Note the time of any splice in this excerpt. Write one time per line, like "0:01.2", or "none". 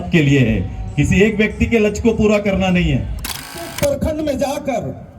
0:03.5